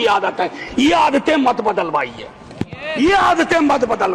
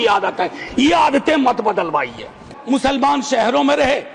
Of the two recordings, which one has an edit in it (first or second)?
second